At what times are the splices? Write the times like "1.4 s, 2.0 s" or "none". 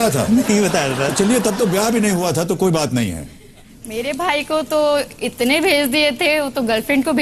3.5 s